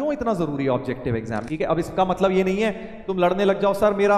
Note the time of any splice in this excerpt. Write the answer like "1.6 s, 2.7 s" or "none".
1.5 s